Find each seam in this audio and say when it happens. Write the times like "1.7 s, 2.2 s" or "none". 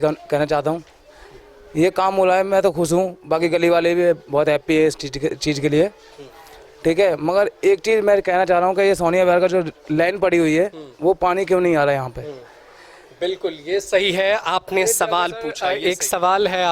15.6 s